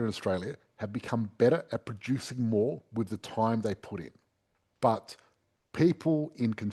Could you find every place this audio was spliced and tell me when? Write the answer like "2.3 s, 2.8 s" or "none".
none